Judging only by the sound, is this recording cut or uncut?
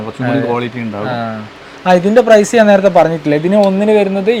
uncut